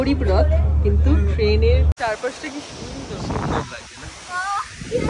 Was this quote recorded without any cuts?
no; 1 cut; at 1.9 s

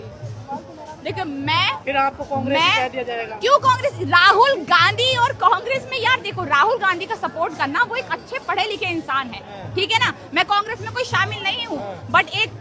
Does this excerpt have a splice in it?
no; 0 cuts

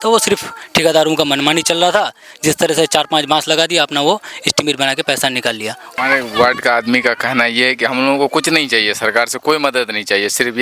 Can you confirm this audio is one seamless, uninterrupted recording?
no; 1 cut; at 5.9 s

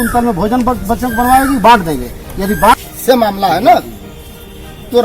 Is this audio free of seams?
no; 1 cut; at 2.8 s

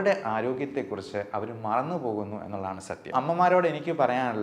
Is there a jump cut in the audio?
yes; 1 cut; at 3.1 s

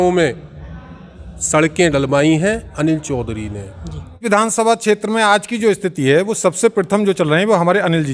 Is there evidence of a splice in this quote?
yes; 1 cut; at 4.2 s

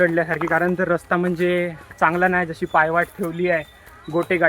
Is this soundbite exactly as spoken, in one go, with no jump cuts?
yes; 0 cuts

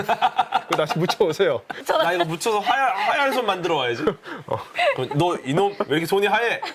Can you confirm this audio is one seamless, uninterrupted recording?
no; 2 cuts; at 1.7 s, 4.7 s

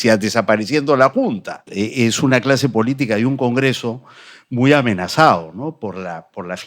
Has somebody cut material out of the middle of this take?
yes; 1 cut; at 1.7 s

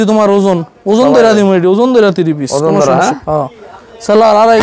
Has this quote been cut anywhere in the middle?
no; 0 cuts

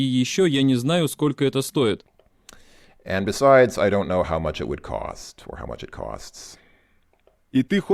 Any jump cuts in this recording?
no; 0 cuts

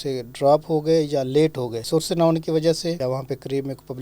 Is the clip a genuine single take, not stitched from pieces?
no; 2 cuts; at 1.8 s, 3.0 s

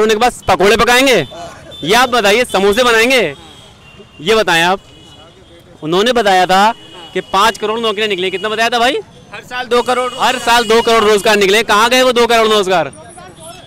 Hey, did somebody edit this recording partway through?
no; 0 cuts

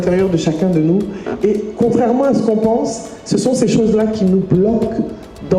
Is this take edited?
no; 0 cuts

